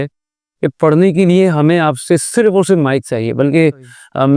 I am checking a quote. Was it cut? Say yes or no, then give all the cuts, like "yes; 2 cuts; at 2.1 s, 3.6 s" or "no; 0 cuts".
no; 0 cuts